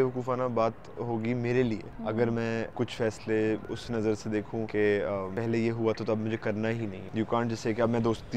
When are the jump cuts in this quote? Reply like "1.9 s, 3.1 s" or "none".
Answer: 1.9 s, 2.7 s, 3.7 s, 4.7 s, 5.3 s, 7.0 s